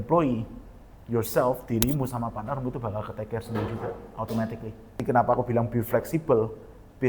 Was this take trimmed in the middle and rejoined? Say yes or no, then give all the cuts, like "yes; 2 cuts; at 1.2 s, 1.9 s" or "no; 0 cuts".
yes; 1 cut; at 5.0 s